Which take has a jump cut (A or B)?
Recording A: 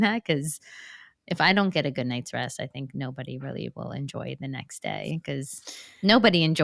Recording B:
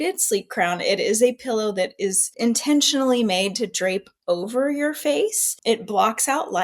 B